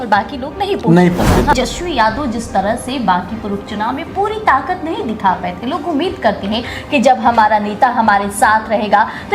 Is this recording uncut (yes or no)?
no